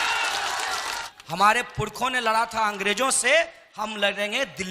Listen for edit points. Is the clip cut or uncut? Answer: cut